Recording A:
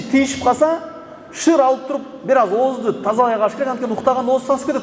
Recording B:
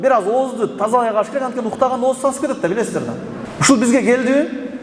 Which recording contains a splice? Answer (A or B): B